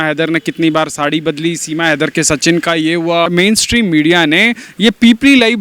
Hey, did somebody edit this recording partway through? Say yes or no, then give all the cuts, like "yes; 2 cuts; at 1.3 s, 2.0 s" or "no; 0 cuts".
yes; 1 cut; at 3.3 s